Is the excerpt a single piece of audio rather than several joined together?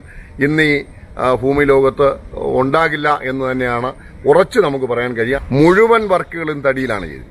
no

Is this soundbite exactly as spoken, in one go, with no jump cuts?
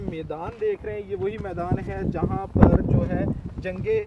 yes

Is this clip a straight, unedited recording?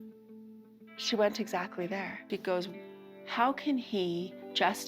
no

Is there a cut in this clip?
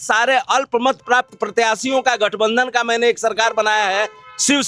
no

